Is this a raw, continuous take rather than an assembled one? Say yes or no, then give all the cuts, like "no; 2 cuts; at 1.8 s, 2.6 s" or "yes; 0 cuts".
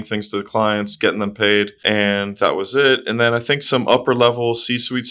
yes; 0 cuts